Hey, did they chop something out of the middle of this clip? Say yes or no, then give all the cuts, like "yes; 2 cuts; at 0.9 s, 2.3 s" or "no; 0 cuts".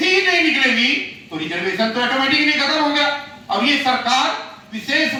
no; 0 cuts